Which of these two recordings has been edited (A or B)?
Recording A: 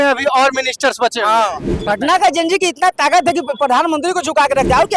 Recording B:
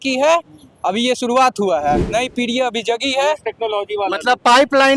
A